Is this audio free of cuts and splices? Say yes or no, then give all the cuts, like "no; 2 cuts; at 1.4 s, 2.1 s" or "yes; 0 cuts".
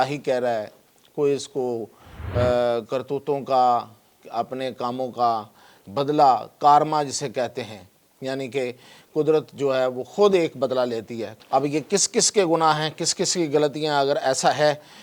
no; 1 cut; at 11.3 s